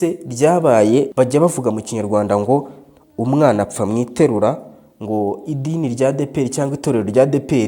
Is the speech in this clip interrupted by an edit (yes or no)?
yes